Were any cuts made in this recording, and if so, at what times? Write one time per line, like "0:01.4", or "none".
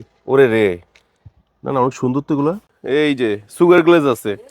0:02.6